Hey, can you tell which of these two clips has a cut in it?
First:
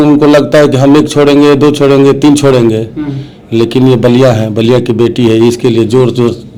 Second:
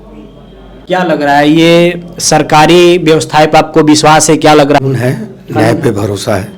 second; 1 cut; at 4.8 s

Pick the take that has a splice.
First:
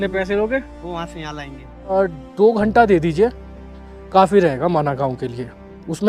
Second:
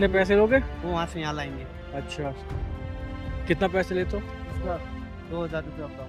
first; 1 cut; at 1.8 s

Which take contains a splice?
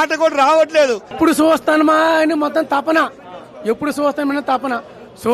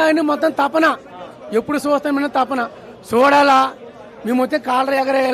first; 1 cut; at 1.1 s

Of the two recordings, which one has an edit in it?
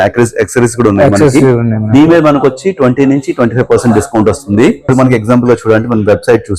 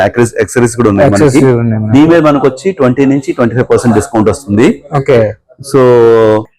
first; 1 cut; at 4.9 s

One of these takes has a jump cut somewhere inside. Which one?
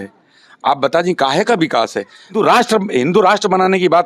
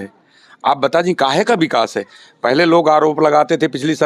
first; 1 cut; at 2.3 s

